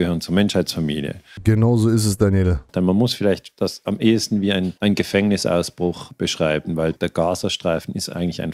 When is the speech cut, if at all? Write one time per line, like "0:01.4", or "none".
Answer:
0:01.4
0:02.7
0:04.7
0:06.1
0:07.0